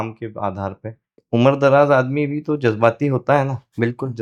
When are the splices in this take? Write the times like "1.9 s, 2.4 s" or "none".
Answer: 1.1 s